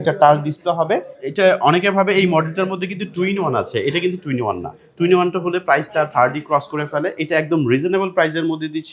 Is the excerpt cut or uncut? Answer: uncut